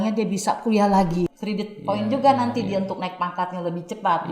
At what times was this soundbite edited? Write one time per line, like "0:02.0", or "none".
0:01.3